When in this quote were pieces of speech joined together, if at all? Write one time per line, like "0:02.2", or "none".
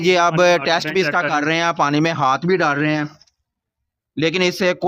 none